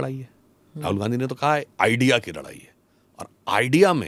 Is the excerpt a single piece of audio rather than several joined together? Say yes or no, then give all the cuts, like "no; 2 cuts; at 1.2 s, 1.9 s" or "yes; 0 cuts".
yes; 0 cuts